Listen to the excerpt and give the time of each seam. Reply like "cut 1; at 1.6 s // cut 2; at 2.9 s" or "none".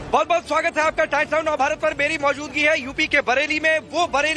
cut 1; at 2.1 s